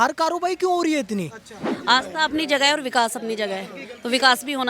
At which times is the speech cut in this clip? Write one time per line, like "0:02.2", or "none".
0:01.7